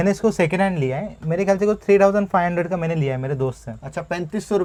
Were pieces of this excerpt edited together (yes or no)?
no